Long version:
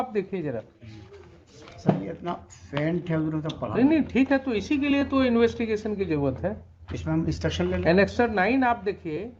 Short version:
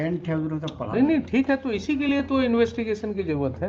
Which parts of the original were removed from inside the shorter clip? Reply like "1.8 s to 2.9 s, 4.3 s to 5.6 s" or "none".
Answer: none

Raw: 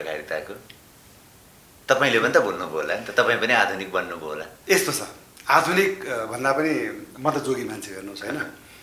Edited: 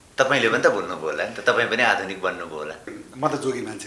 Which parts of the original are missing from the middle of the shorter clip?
4.6 s to 6.9 s

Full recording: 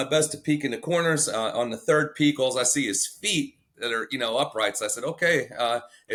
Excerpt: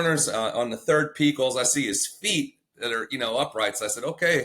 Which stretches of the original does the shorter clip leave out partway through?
none

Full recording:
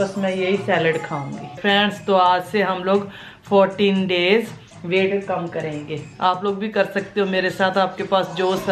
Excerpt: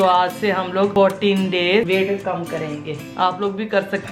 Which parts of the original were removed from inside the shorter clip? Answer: 3.0 s to 3.5 s, 4.4 s to 4.9 s

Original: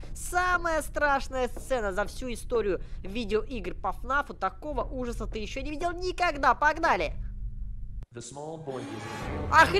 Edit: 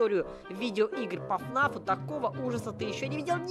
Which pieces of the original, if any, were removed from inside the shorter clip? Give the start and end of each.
none

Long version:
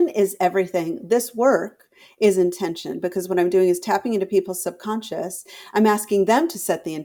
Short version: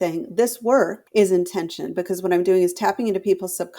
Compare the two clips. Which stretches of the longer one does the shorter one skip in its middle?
1.7 s to 2.1 s

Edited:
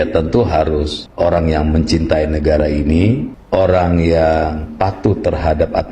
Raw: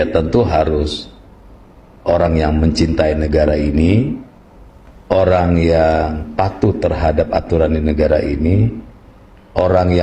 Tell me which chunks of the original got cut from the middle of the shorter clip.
1.0 s to 1.9 s, 4.2 s to 4.9 s

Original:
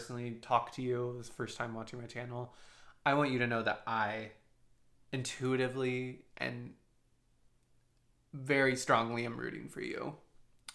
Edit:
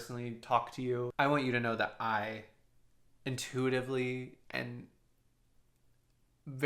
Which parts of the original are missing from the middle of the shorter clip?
1.1 s to 3.0 s

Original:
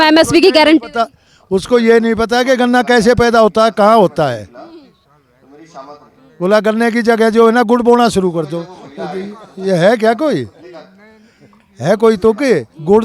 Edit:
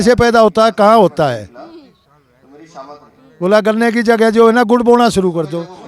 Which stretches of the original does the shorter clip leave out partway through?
none

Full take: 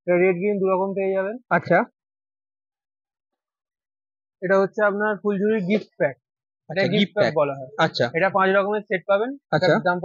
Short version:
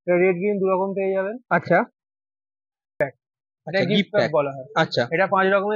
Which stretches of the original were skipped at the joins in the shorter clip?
3.0 s to 6.0 s

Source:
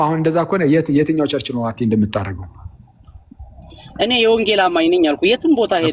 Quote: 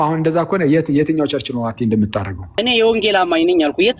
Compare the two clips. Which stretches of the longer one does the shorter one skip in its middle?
2.5 s to 3.9 s

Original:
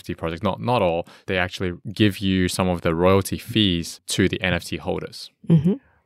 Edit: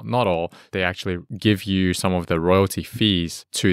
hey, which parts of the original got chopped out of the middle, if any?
none

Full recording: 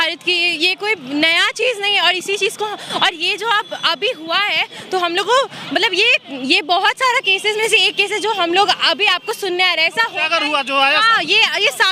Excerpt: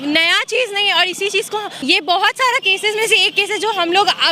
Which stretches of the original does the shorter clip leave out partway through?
2.8 s to 6.3 s

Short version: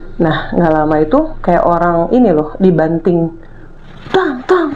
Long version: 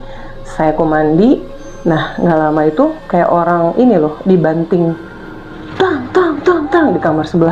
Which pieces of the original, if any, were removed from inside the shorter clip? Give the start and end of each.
none

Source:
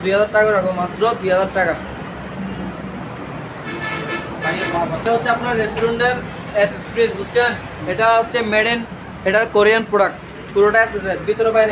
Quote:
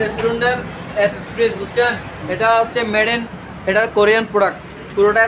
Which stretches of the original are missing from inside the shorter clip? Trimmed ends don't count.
none

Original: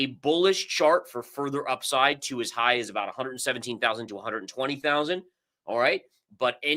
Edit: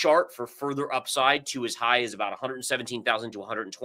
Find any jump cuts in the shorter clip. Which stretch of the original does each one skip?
none

